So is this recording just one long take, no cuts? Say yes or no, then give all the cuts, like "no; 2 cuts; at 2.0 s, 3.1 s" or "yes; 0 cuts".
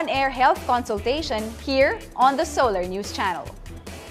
no; 1 cut; at 2.3 s